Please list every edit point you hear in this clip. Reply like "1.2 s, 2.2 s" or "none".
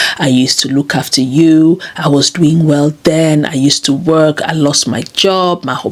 none